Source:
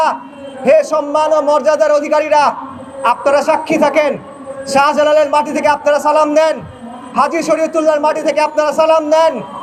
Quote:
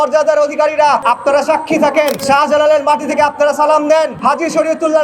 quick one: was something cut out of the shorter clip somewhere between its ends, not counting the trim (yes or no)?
yes